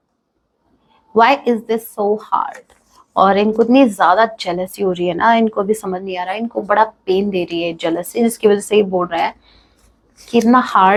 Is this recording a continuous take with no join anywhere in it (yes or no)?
yes